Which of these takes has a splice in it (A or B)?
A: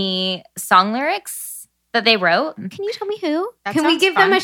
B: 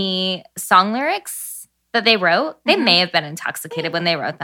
A